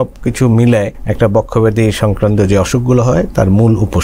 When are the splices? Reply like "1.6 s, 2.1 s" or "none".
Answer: 1.0 s